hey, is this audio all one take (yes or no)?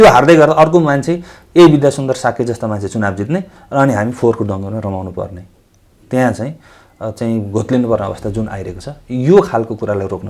yes